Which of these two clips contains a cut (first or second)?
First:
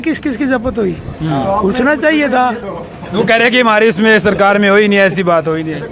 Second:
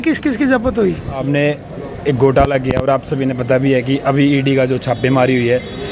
second